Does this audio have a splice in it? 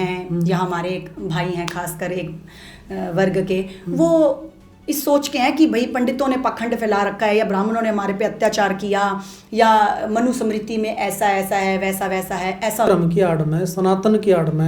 yes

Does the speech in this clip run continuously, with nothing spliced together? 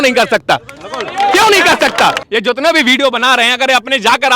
no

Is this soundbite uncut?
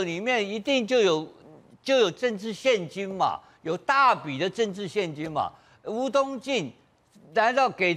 yes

